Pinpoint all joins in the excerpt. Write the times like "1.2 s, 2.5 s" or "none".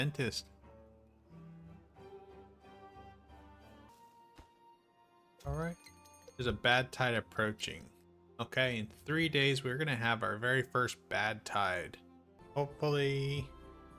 3.9 s, 12.4 s